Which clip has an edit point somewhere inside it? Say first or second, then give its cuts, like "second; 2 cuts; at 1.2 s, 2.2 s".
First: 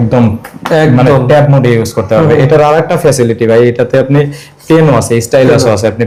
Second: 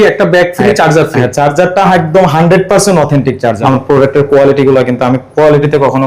second; 1 cut; at 3.6 s